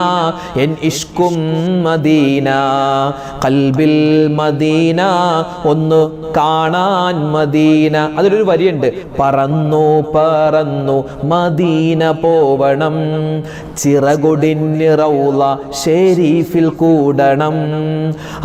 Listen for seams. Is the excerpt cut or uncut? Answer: uncut